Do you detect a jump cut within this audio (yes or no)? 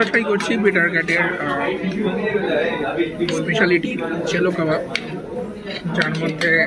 no